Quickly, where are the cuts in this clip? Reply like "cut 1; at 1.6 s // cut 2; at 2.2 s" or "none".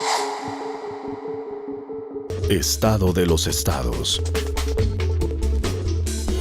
cut 1; at 1.1 s